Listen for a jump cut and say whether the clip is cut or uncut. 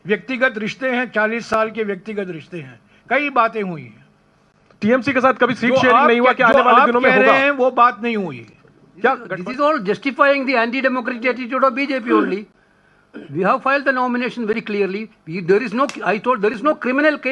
cut